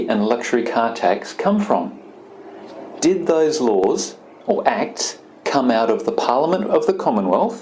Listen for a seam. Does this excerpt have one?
no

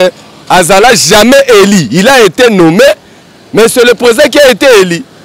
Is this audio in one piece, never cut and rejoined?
yes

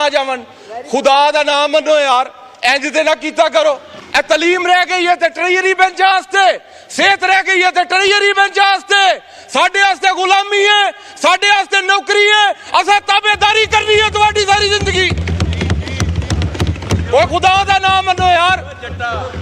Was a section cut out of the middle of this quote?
yes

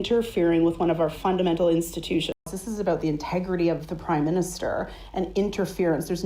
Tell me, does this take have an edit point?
yes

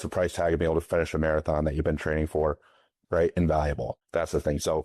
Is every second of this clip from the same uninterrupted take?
no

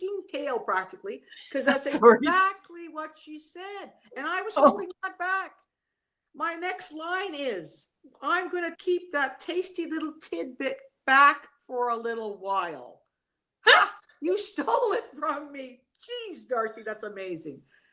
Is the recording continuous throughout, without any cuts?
no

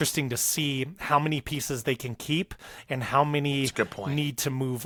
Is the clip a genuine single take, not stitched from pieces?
yes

